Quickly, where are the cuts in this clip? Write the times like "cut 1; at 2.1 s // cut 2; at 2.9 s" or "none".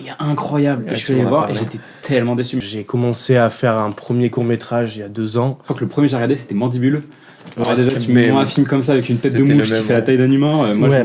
cut 1; at 2.7 s // cut 2; at 5.6 s